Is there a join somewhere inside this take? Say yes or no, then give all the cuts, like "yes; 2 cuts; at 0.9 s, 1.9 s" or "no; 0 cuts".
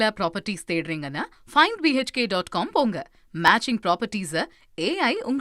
no; 0 cuts